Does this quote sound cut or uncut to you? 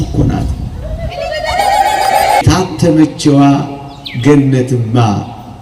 cut